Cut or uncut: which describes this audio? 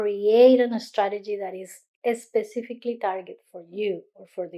uncut